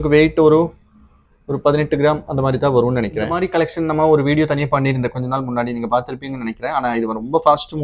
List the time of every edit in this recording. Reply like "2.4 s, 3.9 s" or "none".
3.4 s